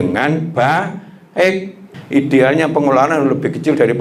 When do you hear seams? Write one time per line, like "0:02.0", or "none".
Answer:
0:01.9